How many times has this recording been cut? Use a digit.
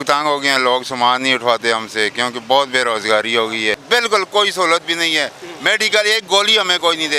1